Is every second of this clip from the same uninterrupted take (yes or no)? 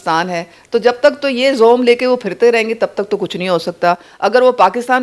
yes